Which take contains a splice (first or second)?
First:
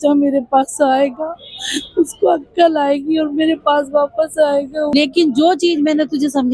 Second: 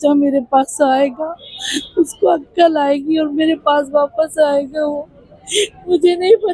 first